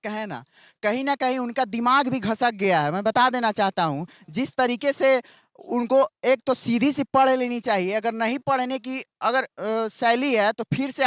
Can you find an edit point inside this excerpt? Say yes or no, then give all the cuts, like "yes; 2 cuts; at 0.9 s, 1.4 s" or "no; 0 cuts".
no; 0 cuts